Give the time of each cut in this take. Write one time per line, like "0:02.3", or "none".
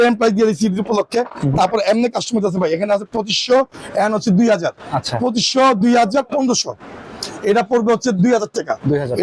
none